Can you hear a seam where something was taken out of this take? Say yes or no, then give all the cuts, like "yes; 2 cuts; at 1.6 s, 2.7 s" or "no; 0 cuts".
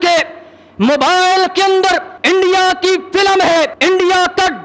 yes; 2 cuts; at 2.1 s, 3.7 s